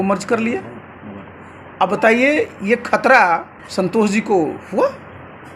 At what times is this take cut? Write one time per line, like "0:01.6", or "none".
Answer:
0:03.6